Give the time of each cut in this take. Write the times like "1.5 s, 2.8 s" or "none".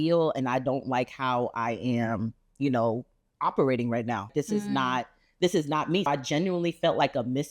4.3 s, 6.1 s

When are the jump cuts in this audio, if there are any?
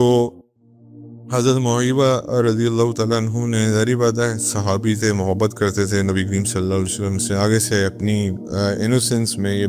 none

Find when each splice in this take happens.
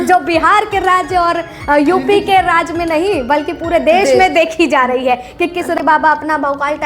5.8 s

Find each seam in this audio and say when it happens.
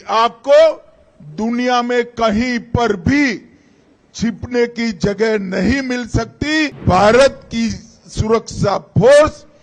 6.8 s

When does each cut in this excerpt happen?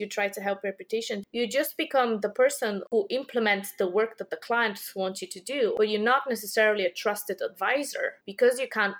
1.2 s, 2.9 s, 5.7 s

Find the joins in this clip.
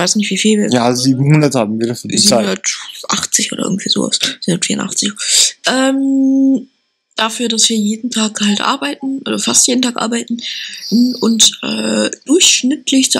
2.2 s

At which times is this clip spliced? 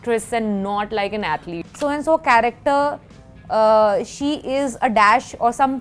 1.6 s

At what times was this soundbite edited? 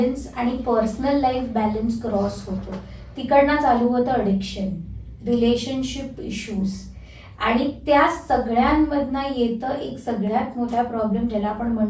none

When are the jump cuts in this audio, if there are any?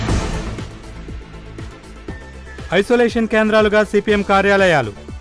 2.3 s

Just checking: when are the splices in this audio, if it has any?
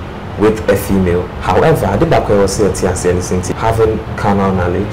1.3 s

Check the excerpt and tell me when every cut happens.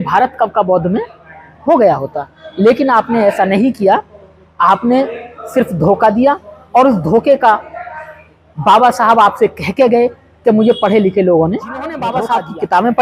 12.0 s

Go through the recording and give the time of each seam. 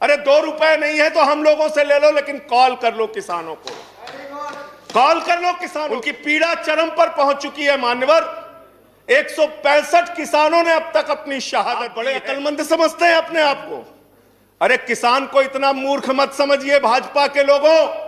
6.1 s, 12.0 s

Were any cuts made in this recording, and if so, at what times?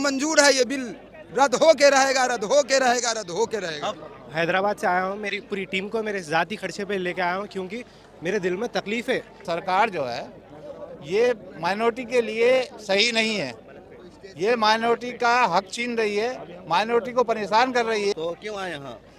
4.0 s, 9.4 s, 18.1 s

